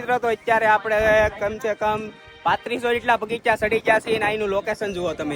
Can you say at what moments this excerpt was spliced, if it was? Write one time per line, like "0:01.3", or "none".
none